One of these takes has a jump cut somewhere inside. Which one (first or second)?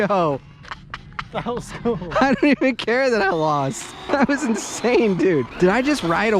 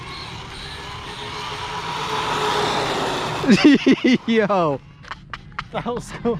first